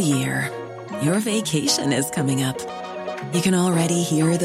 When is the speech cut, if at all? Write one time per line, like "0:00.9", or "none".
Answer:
none